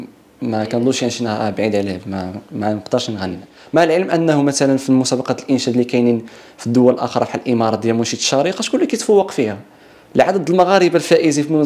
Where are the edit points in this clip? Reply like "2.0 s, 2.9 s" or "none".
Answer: 3.5 s